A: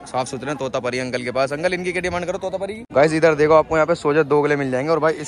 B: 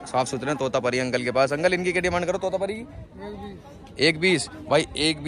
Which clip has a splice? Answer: A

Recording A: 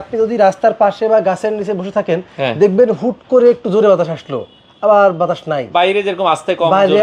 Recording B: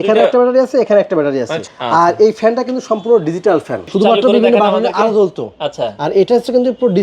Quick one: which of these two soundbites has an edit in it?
B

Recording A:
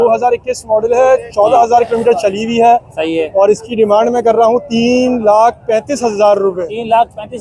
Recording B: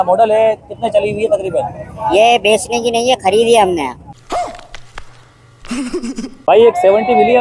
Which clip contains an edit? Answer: B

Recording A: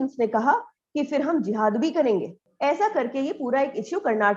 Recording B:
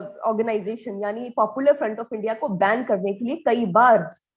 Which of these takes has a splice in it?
A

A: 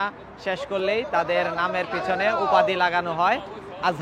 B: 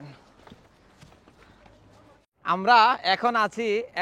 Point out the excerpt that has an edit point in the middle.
B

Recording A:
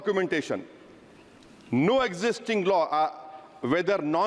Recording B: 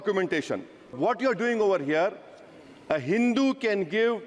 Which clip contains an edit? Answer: B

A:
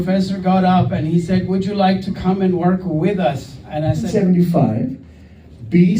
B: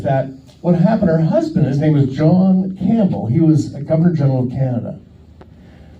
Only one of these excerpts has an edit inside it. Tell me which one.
A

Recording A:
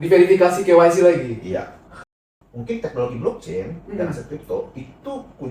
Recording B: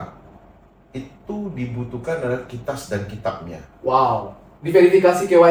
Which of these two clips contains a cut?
A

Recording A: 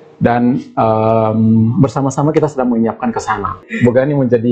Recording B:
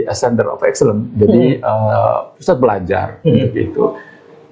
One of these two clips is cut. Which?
A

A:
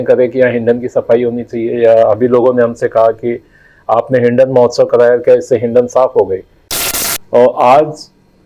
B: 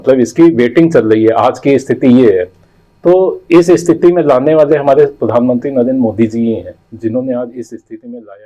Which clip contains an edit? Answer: A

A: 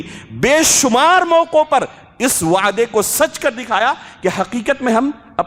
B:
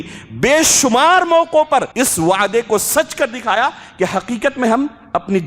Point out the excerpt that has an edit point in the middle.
B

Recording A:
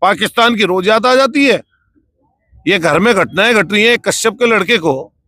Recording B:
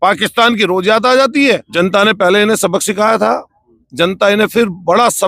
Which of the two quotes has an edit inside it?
B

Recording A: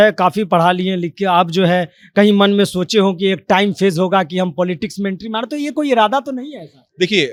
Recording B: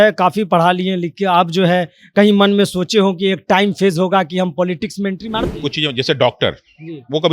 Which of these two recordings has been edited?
B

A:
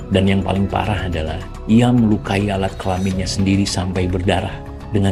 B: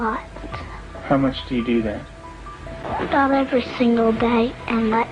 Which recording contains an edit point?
B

